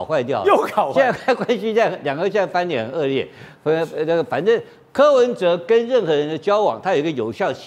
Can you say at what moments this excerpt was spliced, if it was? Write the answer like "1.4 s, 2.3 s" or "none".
none